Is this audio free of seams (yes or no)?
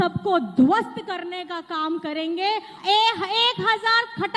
no